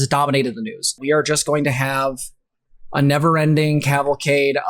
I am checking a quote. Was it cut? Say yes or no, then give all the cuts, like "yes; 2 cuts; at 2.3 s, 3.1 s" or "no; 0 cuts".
yes; 1 cut; at 1.0 s